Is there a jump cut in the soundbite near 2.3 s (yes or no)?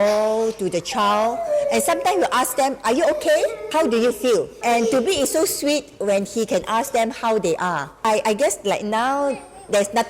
no